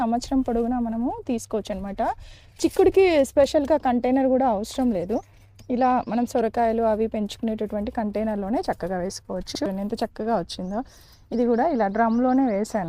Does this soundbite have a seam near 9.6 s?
yes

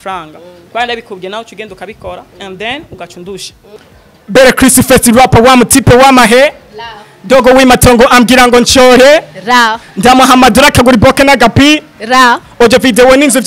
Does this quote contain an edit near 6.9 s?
no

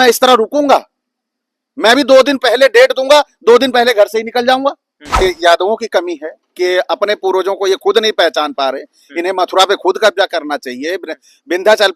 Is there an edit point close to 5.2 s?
yes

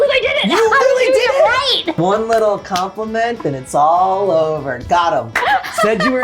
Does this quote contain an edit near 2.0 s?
yes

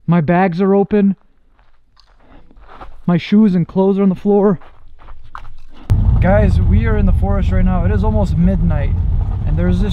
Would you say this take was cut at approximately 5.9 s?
yes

